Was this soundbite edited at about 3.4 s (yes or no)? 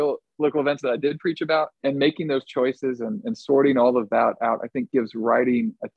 no